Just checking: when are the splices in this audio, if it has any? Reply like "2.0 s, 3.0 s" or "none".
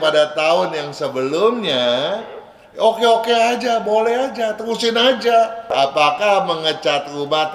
5.6 s